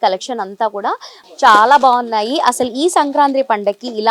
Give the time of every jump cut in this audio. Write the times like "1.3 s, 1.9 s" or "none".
1.2 s